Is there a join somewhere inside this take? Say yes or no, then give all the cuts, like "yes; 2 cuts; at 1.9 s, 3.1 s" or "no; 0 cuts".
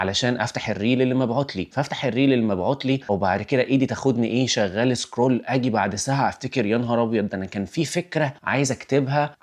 no; 0 cuts